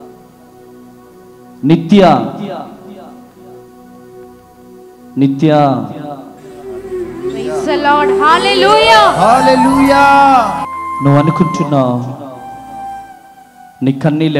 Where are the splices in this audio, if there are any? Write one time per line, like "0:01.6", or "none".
0:10.7